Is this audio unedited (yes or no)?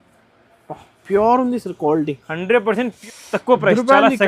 no